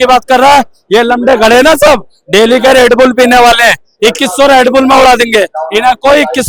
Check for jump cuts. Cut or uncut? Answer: uncut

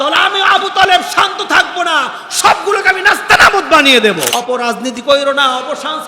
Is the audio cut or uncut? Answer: cut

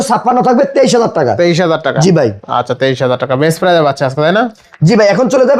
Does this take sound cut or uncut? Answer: uncut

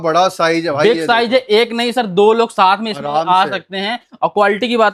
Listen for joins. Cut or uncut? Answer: uncut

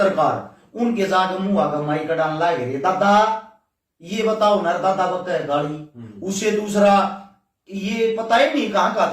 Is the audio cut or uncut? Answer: uncut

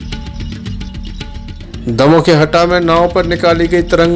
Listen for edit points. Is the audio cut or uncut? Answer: cut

